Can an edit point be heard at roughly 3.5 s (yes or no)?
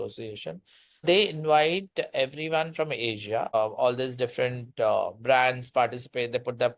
yes